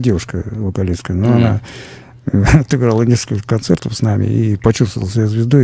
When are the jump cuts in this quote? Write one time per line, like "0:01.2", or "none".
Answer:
none